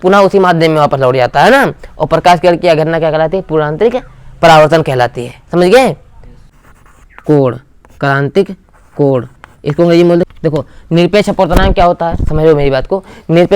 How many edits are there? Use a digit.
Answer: 2